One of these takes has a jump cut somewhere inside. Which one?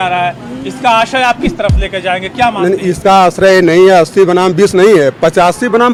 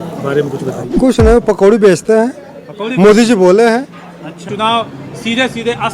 second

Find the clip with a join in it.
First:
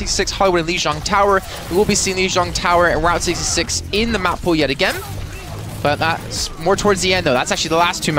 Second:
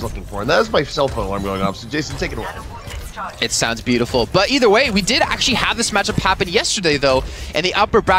first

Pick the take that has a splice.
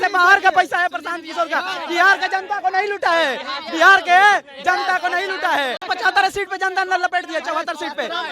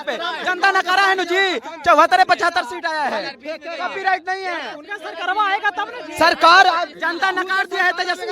first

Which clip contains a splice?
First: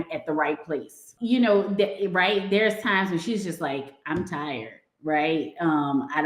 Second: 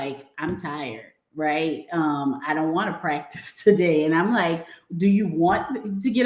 first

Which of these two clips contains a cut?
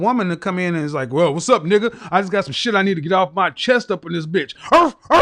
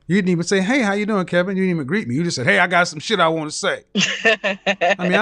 second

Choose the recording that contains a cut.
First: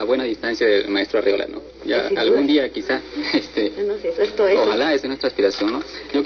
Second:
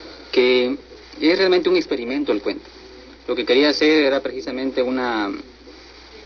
second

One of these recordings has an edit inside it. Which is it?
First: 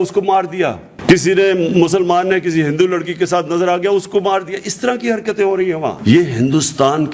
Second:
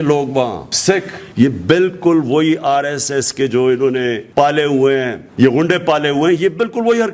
second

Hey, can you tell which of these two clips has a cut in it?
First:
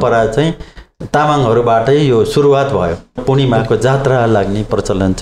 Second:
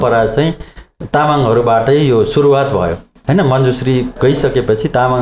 first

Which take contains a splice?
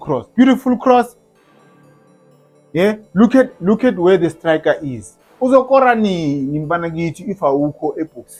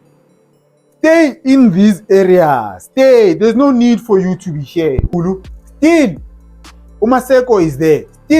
second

